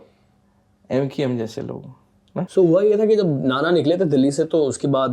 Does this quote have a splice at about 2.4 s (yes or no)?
yes